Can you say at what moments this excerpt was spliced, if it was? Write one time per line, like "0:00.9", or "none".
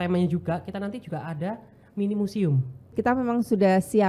0:02.9